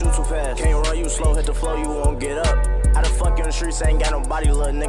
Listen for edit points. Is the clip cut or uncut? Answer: uncut